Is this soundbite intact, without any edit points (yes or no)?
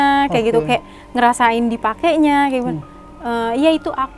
yes